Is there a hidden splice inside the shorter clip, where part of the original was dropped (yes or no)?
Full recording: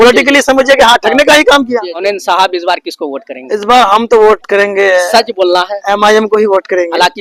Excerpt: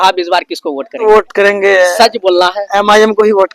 yes